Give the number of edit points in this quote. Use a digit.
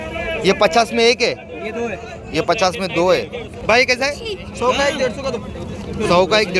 1